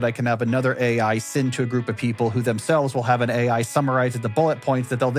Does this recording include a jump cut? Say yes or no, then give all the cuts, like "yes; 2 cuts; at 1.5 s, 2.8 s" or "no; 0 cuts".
no; 0 cuts